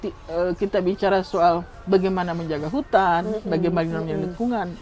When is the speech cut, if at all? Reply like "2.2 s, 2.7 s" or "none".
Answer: 1.7 s